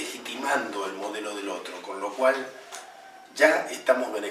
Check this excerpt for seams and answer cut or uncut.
cut